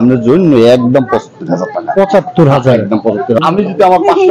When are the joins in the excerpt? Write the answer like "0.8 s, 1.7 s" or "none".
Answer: 3.4 s